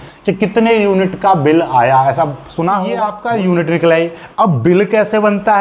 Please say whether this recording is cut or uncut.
cut